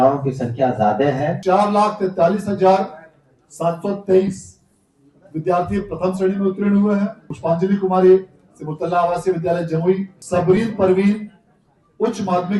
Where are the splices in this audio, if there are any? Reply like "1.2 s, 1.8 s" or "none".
1.4 s, 7.3 s, 10.1 s